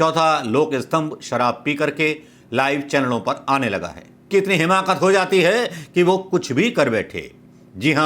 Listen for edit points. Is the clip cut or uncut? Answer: cut